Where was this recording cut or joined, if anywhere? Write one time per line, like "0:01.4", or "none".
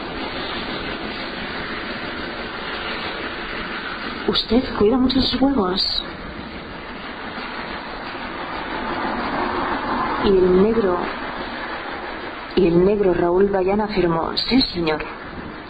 none